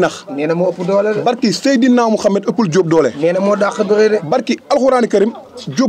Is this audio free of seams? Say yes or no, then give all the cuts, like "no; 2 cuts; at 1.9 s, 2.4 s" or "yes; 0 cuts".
yes; 0 cuts